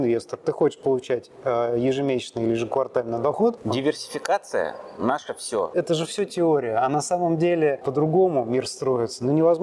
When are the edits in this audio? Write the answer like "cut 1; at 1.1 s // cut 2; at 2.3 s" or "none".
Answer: cut 1; at 3.6 s // cut 2; at 5.7 s // cut 3; at 7.8 s